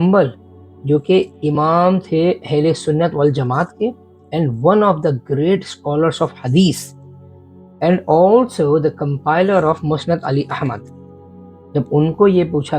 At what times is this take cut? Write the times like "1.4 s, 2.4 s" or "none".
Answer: none